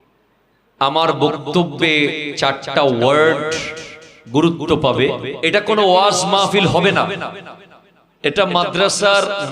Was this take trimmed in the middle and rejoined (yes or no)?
yes